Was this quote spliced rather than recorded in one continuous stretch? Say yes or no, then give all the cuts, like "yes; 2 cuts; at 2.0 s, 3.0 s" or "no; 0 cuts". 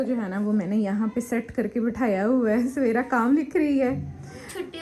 no; 0 cuts